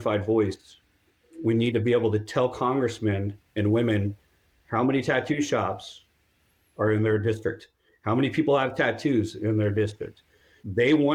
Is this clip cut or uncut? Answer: uncut